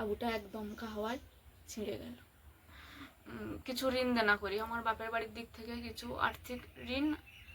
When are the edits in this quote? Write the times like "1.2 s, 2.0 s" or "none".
2.8 s